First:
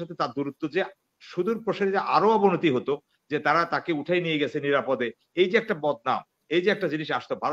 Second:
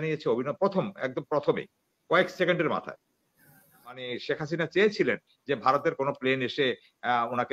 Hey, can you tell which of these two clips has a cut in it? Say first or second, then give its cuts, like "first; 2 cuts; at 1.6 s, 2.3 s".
second; 1 cut; at 4.0 s